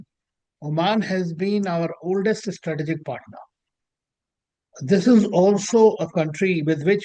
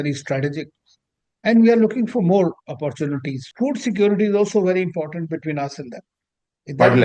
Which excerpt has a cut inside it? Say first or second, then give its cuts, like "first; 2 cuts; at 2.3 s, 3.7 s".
second; 1 cut; at 3.4 s